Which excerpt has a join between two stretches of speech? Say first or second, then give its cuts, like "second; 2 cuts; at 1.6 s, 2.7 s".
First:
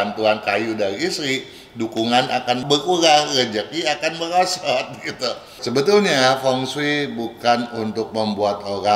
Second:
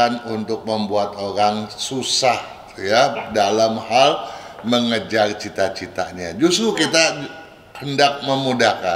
first; 1 cut; at 5.5 s